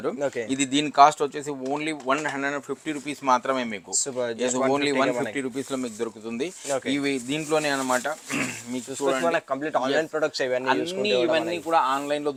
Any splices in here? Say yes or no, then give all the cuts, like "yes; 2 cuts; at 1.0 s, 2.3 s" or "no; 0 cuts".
no; 0 cuts